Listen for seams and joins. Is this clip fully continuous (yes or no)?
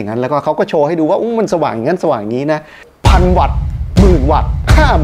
no